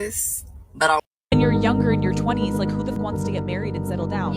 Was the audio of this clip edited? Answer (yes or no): yes